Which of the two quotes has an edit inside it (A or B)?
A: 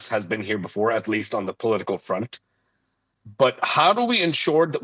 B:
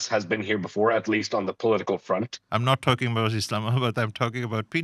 B